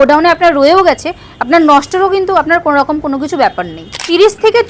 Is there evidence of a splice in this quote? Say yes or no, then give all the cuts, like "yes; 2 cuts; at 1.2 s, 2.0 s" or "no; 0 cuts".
yes; 1 cut; at 3.7 s